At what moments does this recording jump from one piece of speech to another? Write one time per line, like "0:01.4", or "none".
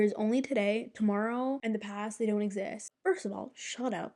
0:02.9

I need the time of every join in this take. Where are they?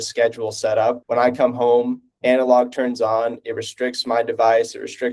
0:01.0
0:02.1

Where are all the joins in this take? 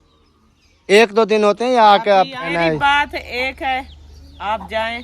0:02.5

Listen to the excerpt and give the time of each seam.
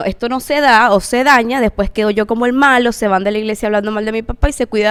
none

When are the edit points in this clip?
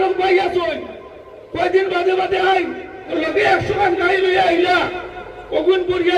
0:03.1

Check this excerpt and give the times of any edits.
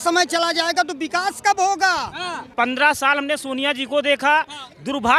0:02.4

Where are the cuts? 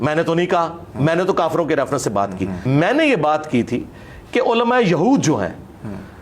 0:02.6

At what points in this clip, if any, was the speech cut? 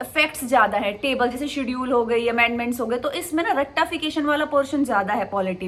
none

